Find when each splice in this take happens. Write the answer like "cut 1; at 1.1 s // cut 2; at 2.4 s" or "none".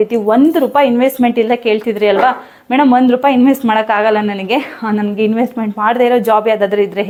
none